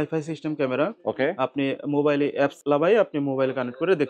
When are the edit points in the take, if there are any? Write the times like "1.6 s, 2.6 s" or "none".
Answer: 2.6 s

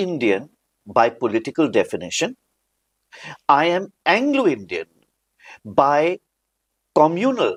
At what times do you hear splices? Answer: none

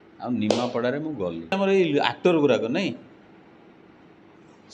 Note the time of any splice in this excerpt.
1.5 s

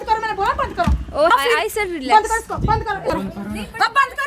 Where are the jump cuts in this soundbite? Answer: 1.3 s, 3.0 s

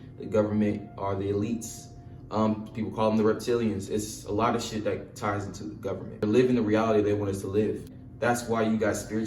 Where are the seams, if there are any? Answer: 6.2 s

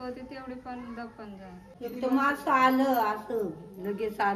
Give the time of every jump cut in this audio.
1.7 s

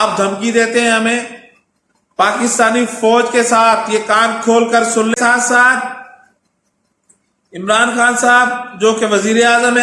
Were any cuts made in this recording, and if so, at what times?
5.1 s

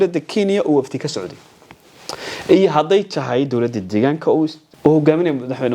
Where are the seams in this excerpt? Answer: 4.6 s

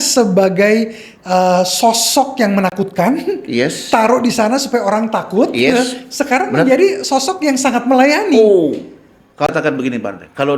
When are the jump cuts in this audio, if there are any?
9.5 s

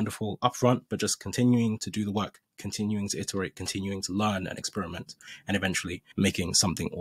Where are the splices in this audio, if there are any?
6.0 s

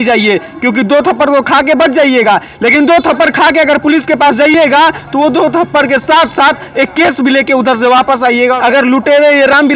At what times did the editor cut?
8.6 s

